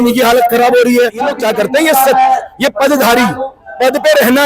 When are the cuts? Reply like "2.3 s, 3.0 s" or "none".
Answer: 1.4 s

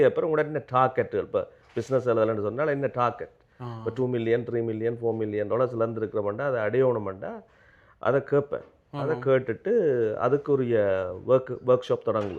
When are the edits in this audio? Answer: none

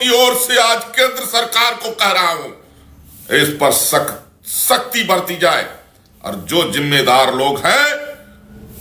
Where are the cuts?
none

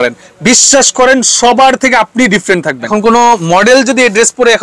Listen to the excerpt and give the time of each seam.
2.8 s

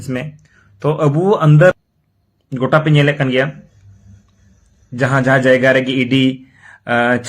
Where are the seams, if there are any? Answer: 1.7 s

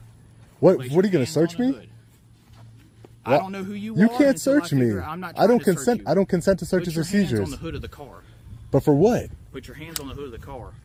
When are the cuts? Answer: none

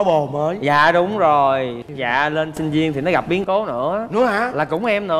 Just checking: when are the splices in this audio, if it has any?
1.8 s

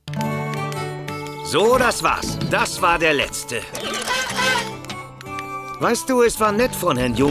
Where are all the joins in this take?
none

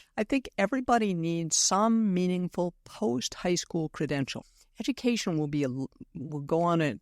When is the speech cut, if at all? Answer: 4.4 s

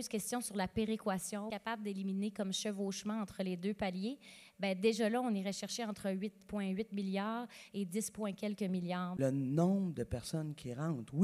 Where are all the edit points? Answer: 1.5 s, 9.2 s

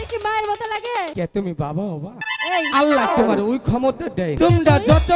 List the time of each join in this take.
1.1 s, 2.3 s, 4.4 s

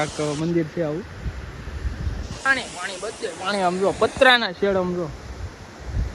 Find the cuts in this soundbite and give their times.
2.5 s

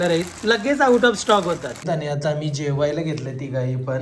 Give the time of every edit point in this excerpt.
1.8 s

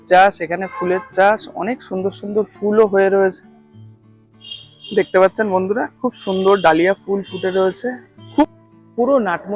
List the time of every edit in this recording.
8.4 s

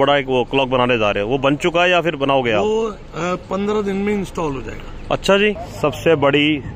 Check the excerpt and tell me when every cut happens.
5.7 s

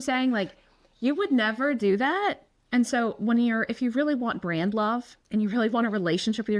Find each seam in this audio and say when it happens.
2.5 s, 5.2 s

